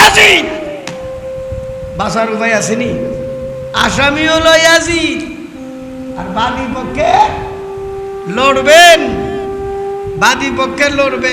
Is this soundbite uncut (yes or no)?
no